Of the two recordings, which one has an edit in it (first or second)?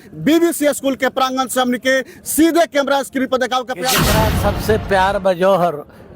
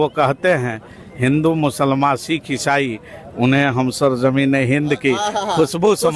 first